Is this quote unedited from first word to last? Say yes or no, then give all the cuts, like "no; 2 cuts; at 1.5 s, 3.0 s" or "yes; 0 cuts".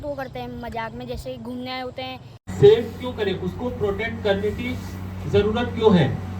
no; 1 cut; at 2.5 s